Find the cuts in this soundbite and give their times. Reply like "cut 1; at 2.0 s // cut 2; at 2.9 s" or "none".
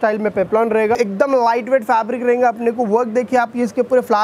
cut 1; at 1.0 s